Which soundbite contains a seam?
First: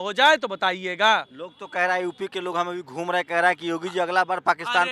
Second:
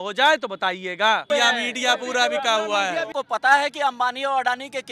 second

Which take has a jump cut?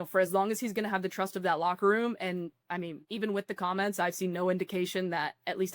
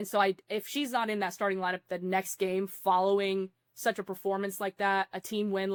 first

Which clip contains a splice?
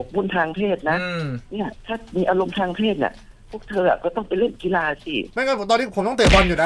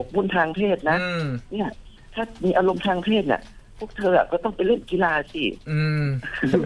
first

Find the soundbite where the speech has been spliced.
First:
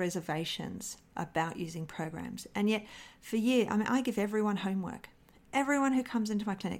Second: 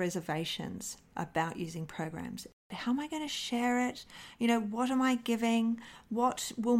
second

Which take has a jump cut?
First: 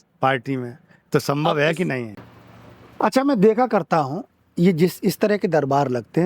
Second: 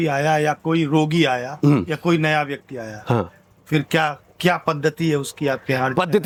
first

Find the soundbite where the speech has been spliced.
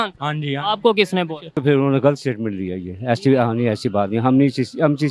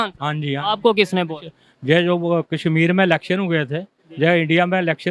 first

